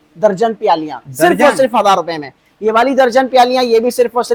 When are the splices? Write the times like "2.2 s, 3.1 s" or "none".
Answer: none